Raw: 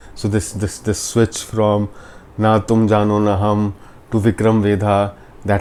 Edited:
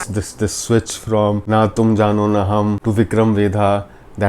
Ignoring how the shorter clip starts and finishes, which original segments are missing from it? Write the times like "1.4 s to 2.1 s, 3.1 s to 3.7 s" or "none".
1.9 s to 2.3 s, 3.7 s to 4.1 s